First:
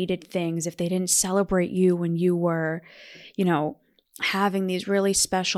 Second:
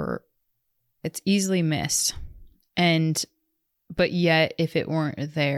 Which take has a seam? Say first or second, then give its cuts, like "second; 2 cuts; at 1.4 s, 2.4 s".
second; 1 cut; at 1.0 s